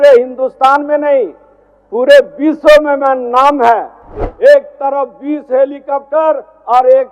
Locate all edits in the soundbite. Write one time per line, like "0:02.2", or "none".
0:04.2